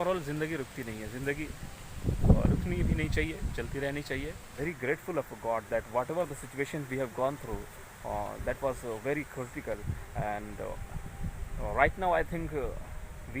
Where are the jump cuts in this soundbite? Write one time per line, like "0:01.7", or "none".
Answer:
0:04.5